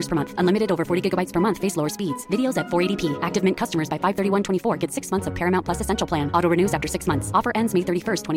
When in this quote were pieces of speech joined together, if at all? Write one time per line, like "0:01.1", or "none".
none